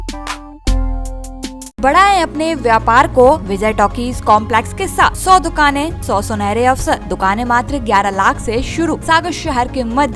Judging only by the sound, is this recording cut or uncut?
cut